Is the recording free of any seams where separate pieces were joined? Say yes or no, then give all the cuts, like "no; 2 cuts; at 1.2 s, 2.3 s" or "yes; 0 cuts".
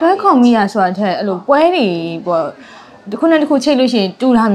yes; 0 cuts